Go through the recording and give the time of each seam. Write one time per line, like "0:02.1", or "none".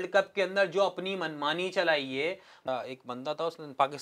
0:02.7